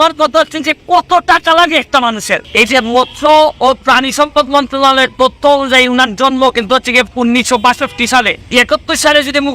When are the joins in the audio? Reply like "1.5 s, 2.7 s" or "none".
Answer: 2.4 s, 8.4 s